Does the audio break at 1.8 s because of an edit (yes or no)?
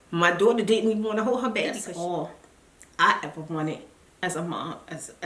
yes